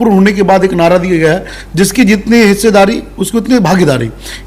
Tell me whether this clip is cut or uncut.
cut